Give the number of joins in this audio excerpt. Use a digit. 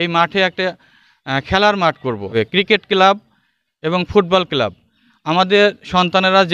1